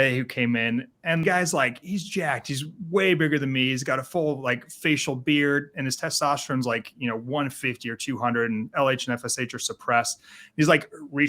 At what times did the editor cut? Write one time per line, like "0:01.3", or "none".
0:01.2